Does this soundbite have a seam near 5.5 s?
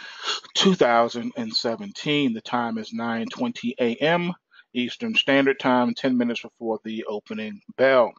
no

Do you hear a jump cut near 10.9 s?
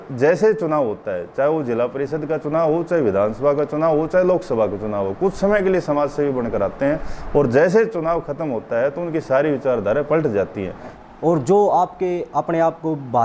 yes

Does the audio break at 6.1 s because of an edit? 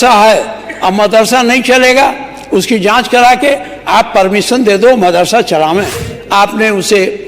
yes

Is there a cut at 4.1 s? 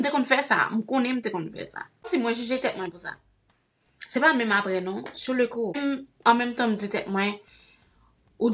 no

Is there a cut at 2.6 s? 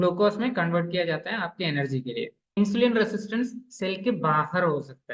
yes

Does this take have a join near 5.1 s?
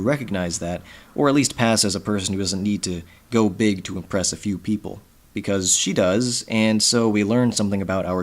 no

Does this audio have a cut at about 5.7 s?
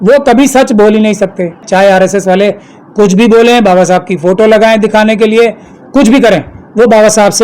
no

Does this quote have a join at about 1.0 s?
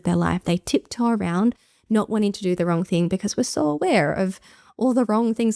no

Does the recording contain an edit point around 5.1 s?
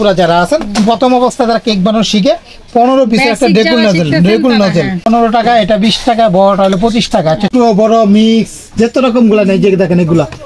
yes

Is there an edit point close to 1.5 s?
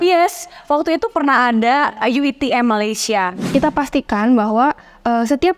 no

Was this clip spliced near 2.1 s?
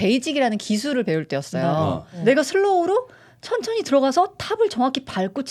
yes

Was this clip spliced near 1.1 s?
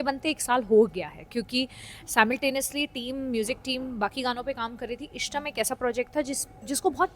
no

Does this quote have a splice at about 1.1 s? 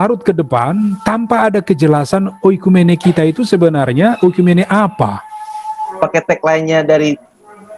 no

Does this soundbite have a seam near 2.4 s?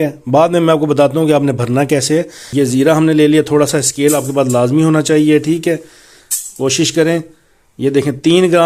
yes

